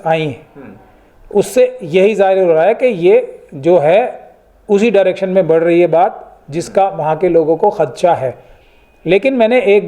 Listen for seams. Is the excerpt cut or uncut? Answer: uncut